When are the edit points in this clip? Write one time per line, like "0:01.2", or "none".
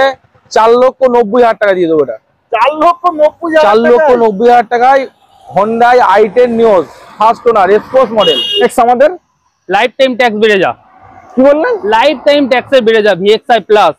0:08.6